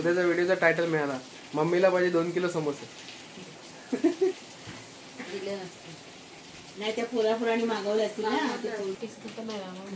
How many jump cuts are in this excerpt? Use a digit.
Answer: 1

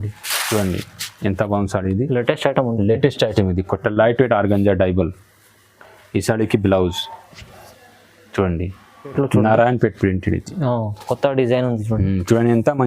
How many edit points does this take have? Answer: 1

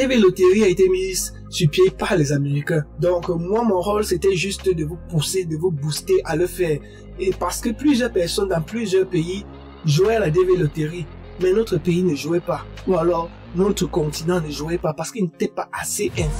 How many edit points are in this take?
1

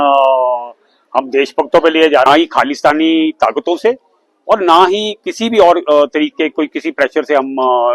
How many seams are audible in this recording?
1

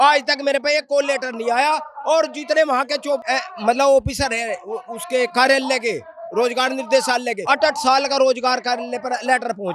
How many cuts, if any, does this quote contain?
2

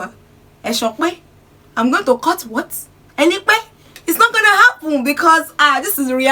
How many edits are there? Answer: 0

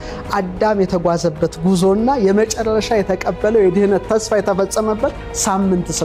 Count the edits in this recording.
0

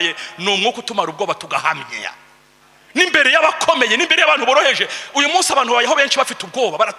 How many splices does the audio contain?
0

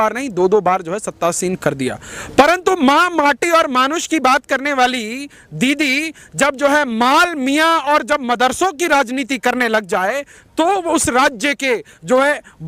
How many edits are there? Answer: 0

